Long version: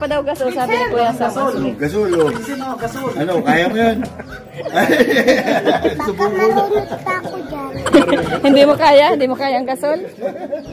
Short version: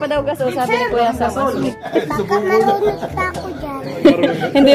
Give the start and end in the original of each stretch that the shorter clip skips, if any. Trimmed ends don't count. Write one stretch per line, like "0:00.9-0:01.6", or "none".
0:01.9-0:05.8